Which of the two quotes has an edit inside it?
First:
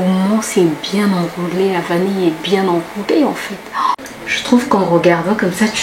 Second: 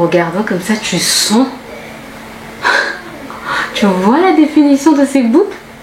first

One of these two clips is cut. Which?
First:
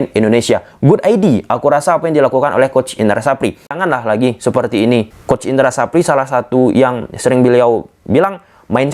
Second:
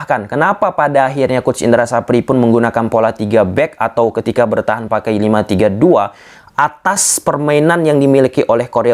first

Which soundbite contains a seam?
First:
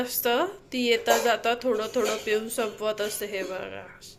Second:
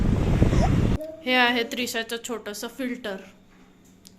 second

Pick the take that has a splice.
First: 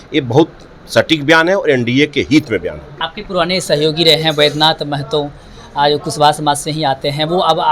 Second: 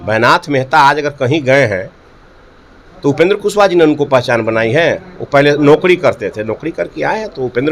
first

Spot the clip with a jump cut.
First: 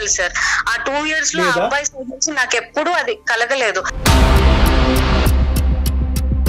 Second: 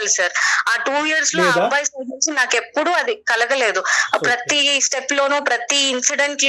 first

